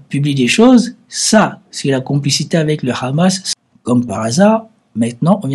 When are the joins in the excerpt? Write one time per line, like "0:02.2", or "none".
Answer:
0:03.5

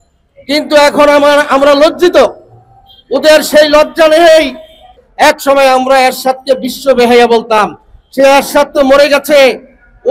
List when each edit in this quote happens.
0:05.0

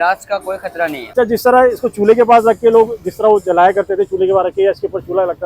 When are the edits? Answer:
0:01.0

